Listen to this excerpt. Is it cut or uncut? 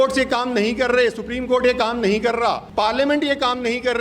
cut